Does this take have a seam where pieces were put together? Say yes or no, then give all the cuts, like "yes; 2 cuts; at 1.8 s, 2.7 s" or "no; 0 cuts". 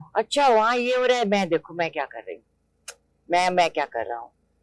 no; 0 cuts